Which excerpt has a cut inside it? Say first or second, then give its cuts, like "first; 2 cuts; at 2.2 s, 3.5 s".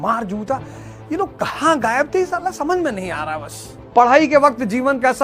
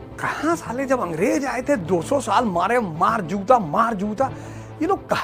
first; 1 cut; at 3.7 s